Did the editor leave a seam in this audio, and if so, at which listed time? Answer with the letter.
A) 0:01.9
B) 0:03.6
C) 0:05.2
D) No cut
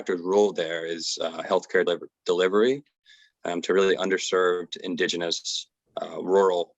A